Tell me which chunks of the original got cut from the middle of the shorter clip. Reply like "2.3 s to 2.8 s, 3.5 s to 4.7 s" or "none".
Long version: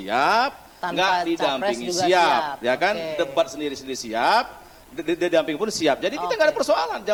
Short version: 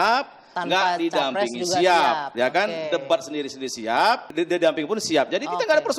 4.5 s to 5.0 s